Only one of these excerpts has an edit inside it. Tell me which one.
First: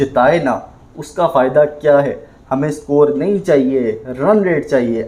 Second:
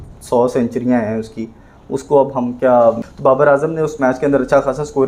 second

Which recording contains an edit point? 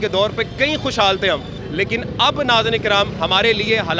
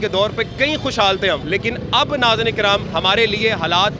second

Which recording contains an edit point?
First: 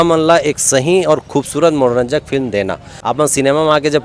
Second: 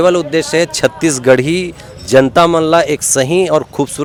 first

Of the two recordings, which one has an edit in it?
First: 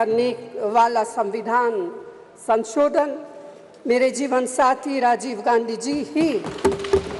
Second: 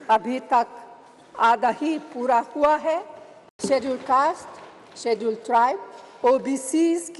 second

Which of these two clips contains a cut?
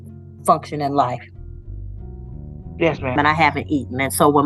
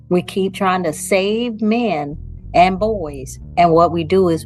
first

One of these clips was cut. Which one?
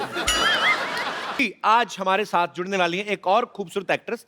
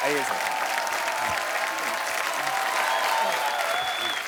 first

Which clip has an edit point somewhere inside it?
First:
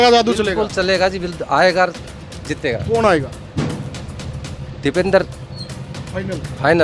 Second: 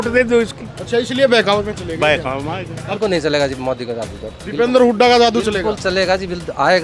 second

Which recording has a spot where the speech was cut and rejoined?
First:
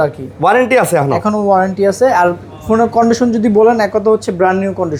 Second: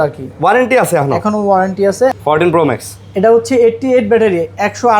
second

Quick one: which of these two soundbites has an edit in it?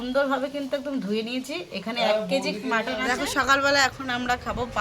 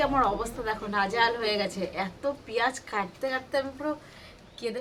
first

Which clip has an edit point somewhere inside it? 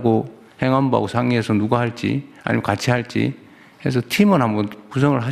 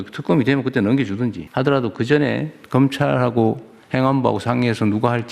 second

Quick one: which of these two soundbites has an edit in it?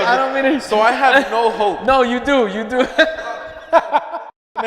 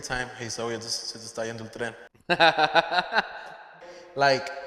second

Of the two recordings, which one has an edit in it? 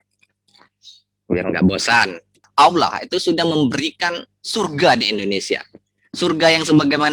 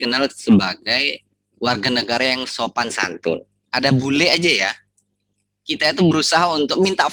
first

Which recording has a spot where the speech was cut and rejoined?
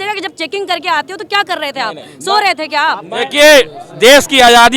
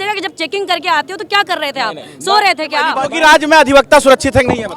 second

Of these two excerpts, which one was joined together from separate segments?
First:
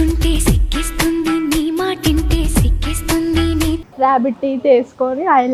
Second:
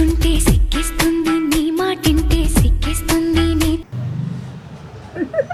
first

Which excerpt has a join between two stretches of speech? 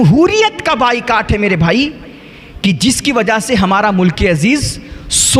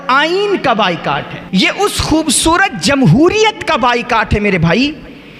second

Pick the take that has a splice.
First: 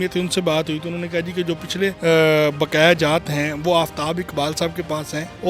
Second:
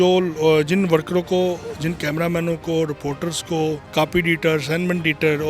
second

